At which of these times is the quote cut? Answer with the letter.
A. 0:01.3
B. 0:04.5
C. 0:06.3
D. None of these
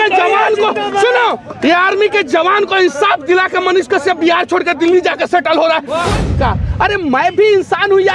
C